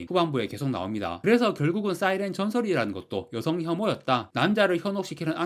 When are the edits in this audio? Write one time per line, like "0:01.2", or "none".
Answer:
0:01.2
0:04.3